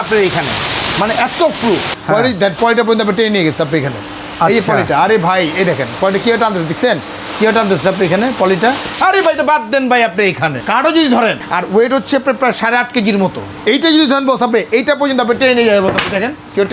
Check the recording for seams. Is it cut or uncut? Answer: cut